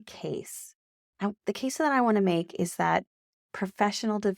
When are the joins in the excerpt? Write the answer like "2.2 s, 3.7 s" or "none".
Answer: none